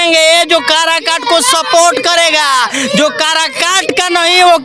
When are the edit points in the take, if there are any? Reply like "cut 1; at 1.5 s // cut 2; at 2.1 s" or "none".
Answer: none